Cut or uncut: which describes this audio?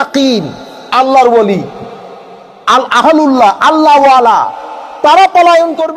uncut